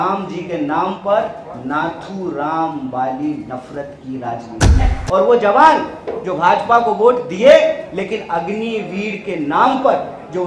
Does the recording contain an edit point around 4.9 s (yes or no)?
yes